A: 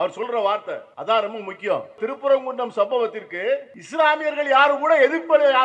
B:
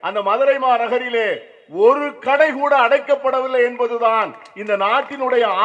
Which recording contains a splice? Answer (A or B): A